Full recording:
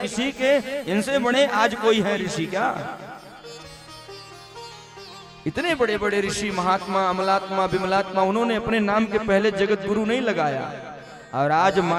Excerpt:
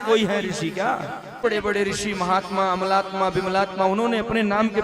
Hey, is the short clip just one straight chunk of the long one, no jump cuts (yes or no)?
no